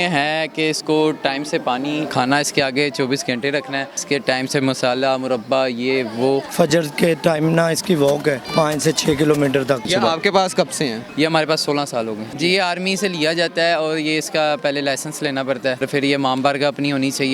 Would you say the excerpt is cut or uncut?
cut